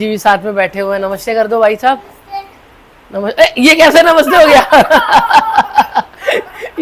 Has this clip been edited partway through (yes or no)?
no